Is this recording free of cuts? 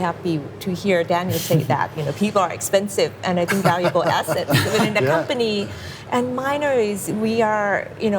yes; 0 cuts

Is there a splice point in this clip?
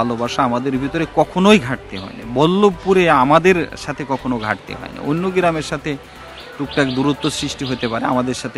no; 0 cuts

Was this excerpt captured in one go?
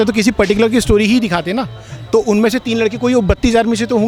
yes; 0 cuts

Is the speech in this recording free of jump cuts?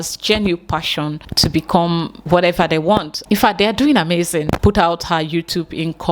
no; 3 cuts; at 1.2 s, 3.1 s, 4.6 s

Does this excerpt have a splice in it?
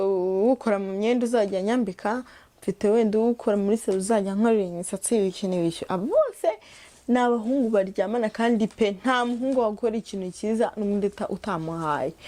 no; 0 cuts

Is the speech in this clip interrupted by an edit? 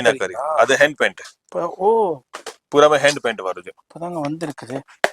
no; 0 cuts

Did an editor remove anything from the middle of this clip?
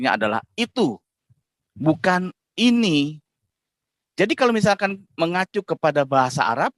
no; 0 cuts

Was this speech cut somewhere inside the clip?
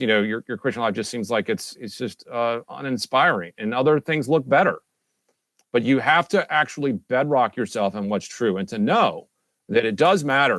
no; 0 cuts

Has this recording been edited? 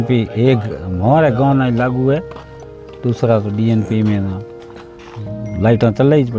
no; 0 cuts

